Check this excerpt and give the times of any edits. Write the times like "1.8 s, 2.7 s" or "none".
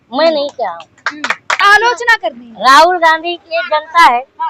1.6 s